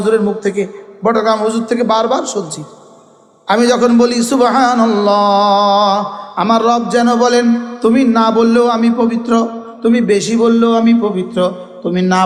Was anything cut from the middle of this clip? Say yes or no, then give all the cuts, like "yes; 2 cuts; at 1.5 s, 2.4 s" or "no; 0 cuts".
no; 0 cuts